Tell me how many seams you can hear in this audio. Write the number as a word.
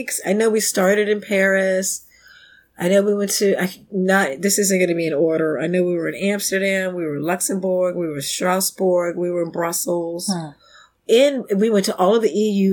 zero